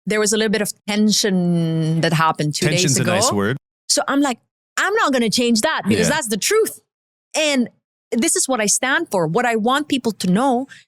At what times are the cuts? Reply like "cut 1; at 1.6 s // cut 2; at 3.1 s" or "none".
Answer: cut 1; at 3.7 s